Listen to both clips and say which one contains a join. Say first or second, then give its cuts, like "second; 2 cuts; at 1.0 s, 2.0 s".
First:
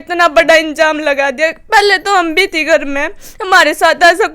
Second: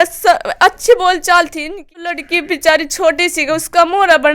second; 1 cut; at 2.1 s